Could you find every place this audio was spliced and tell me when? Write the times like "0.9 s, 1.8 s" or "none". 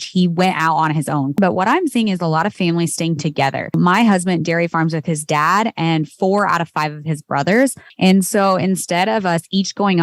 1.4 s, 3.7 s, 7.8 s

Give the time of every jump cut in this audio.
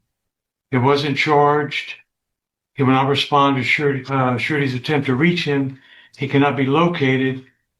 none

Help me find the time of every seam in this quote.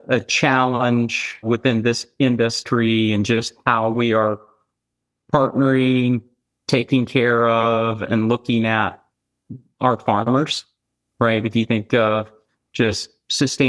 1.4 s, 3.9 s

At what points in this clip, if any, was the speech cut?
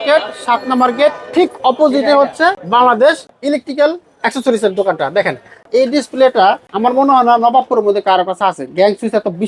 2.6 s, 3.3 s, 5.7 s, 6.7 s

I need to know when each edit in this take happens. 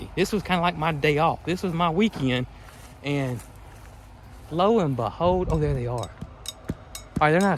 none

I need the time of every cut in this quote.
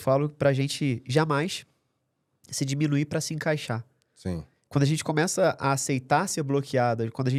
none

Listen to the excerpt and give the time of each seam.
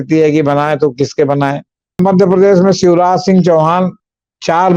2.0 s

